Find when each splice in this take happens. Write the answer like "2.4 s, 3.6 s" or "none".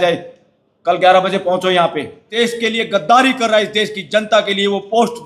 2.2 s

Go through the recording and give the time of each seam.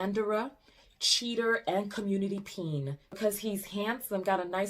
3.2 s

